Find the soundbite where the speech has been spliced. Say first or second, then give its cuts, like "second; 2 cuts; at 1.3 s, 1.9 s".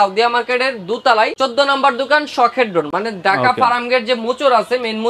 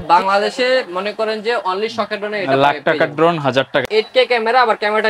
second; 1 cut; at 3.9 s